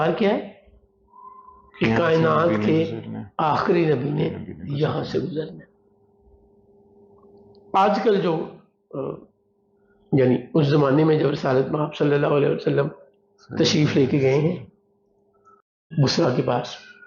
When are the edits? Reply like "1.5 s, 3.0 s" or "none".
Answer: 15.9 s